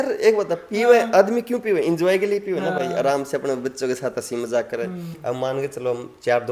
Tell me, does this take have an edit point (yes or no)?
no